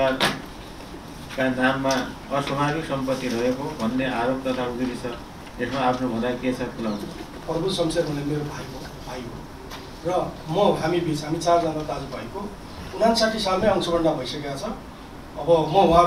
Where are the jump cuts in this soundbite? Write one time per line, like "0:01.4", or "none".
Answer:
0:07.3